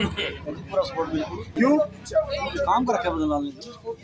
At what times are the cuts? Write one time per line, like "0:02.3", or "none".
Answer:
0:01.5